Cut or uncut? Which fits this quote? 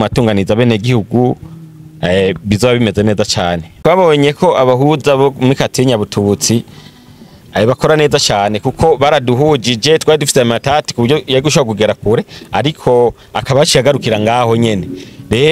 cut